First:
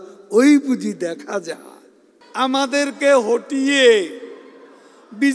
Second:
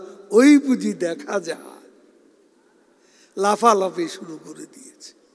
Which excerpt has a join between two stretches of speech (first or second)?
first